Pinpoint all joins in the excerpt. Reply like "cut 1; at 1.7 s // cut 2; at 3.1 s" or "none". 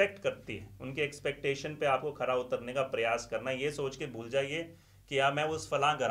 none